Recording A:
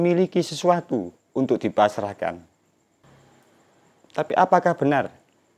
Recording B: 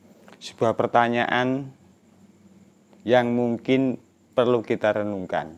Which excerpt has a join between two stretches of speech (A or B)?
A